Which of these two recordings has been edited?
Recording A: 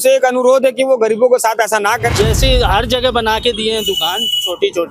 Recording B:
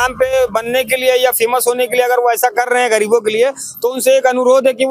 A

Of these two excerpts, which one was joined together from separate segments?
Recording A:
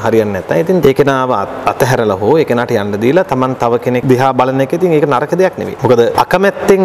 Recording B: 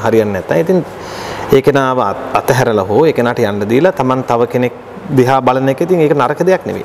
A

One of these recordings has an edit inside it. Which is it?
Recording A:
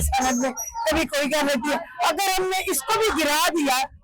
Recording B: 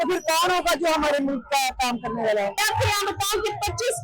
B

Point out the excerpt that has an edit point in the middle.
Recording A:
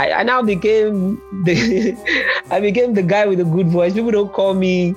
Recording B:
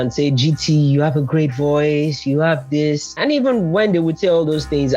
B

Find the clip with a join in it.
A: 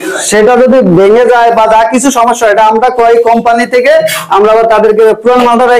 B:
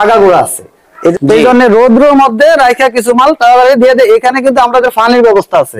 B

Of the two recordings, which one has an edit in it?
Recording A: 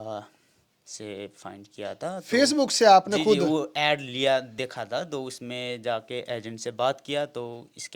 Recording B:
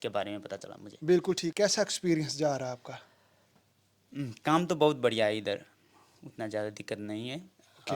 B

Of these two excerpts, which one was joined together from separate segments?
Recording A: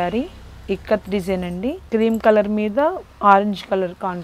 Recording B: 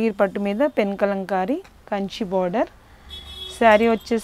A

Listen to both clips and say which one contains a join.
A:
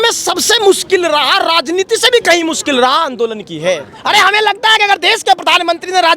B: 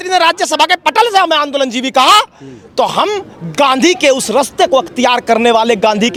A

